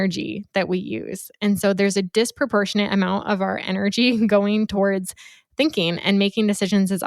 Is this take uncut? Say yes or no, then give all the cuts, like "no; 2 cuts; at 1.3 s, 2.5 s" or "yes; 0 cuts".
yes; 0 cuts